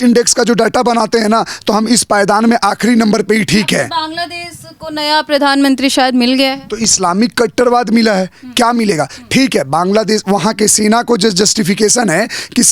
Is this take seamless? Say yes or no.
yes